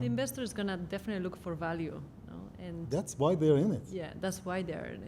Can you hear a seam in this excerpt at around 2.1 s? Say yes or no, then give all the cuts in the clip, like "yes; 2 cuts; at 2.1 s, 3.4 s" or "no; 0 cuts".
no; 0 cuts